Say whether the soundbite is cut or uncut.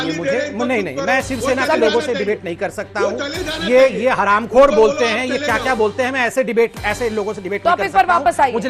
uncut